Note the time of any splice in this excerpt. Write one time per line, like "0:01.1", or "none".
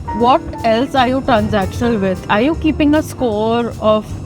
none